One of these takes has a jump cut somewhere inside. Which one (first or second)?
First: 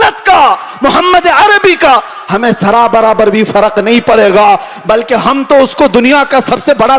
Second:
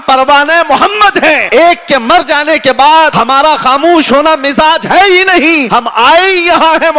second